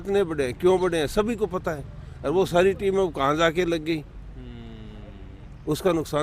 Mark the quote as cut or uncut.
uncut